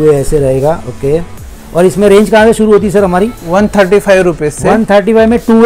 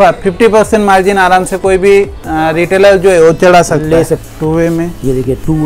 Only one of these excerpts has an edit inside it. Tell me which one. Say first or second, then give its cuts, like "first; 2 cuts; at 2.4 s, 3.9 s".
second; 1 cut; at 4.2 s